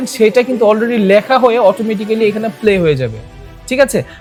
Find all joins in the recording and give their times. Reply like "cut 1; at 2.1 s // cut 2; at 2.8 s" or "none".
none